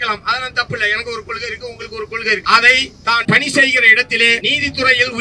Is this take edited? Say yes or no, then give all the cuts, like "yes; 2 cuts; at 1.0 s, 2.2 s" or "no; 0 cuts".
yes; 3 cuts; at 2.4 s, 3.2 s, 4.4 s